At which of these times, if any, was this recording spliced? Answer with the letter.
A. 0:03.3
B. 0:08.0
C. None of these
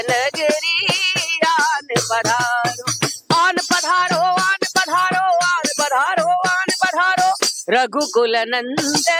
C